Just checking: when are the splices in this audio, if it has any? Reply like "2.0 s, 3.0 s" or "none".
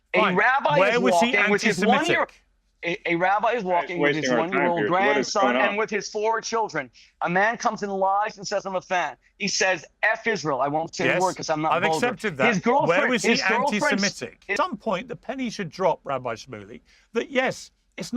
14.4 s